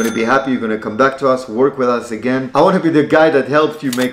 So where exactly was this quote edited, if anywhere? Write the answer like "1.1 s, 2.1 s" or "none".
2.5 s